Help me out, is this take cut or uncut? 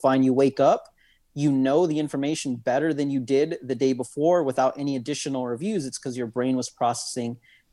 uncut